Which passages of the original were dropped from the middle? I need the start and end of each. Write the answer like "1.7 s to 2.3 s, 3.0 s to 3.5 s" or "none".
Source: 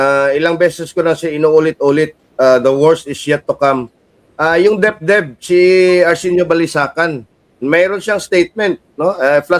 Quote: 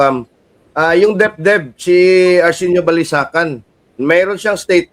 none

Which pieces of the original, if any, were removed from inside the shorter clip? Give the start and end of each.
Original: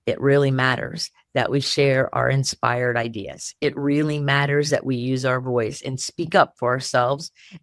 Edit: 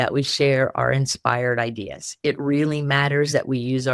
none

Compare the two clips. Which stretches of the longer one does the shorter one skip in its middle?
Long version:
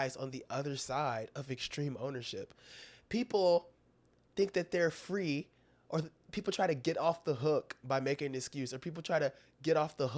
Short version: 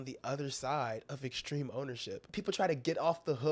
2.5 s to 6.2 s

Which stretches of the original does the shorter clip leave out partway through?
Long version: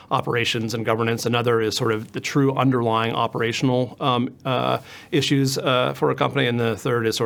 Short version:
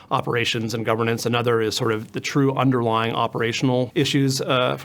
3.9 s to 5.1 s

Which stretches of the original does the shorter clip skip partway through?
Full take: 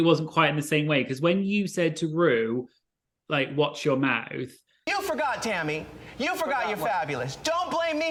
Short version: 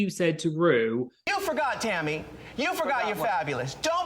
2.8 s to 4.8 s

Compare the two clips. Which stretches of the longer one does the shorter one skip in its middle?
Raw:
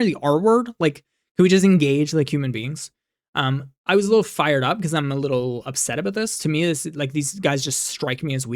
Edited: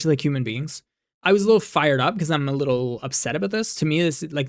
3.1 s to 3.7 s

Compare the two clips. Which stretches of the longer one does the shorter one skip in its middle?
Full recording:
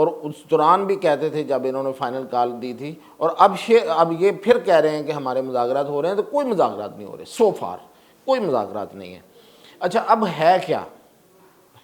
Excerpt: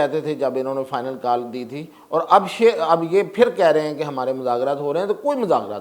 none

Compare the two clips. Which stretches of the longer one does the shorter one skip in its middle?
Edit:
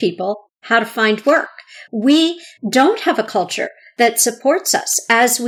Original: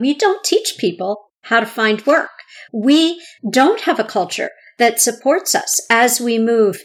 none

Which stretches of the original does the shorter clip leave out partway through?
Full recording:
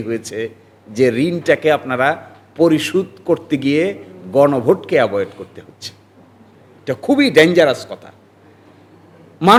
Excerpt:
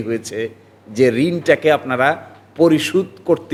none

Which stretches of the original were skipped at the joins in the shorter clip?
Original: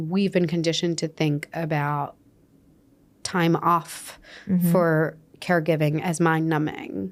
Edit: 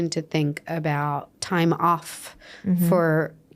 2.2 s to 3.2 s

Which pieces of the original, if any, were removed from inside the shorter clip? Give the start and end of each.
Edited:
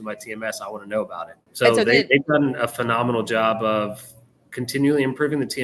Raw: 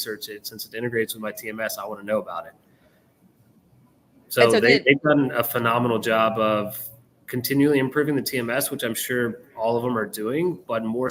2.6 s to 4.2 s

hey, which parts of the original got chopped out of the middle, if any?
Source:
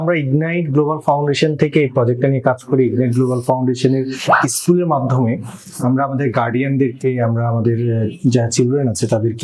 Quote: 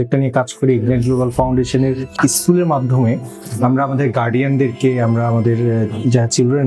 4.3 s to 4.4 s

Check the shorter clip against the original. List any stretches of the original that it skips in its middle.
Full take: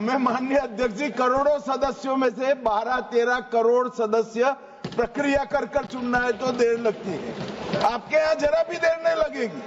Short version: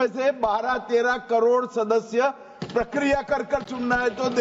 none

